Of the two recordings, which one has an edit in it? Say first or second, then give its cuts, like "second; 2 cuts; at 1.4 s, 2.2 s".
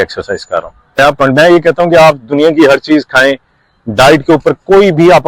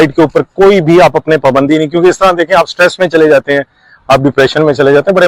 first; 1 cut; at 1.2 s